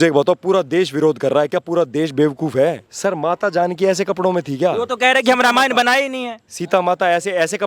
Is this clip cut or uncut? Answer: cut